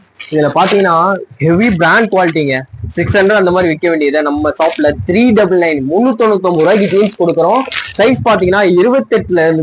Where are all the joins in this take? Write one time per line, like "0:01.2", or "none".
none

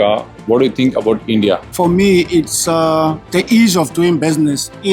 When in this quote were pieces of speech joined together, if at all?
0:01.7

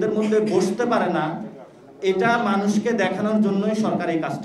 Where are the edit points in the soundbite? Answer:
none

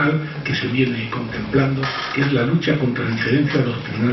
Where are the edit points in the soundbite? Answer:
0:01.8

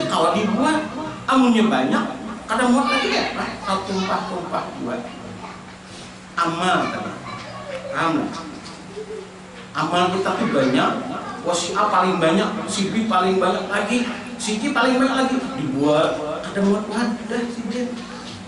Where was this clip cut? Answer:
none

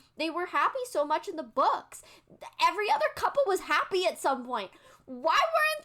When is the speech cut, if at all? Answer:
none

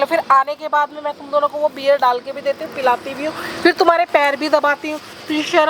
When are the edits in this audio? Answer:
none

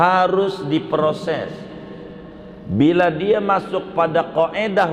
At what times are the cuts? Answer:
none

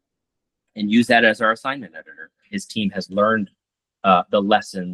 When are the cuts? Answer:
0:02.4

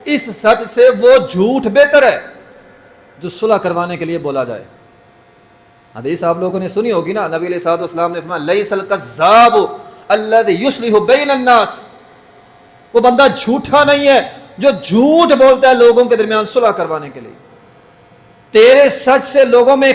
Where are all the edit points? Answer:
none

